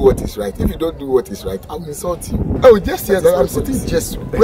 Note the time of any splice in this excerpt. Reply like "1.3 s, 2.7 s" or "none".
2.6 s